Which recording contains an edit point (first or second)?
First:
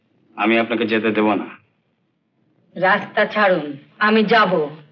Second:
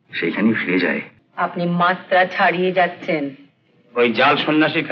second